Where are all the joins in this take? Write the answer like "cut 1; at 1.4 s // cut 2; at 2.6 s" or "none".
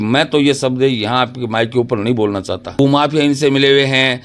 cut 1; at 2.8 s